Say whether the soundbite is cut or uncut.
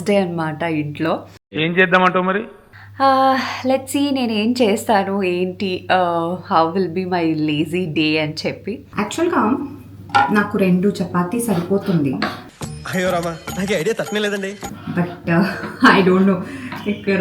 cut